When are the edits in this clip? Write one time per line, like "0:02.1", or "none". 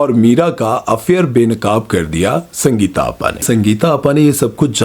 0:03.4